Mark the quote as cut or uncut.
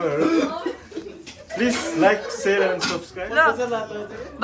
cut